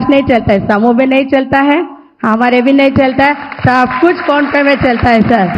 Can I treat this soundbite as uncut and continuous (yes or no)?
yes